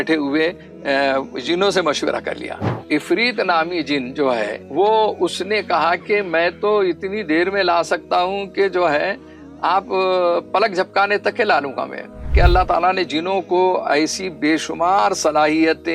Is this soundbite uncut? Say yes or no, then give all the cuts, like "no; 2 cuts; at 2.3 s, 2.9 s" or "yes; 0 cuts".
no; 3 cuts; at 2.8 s, 4.6 s, 12.3 s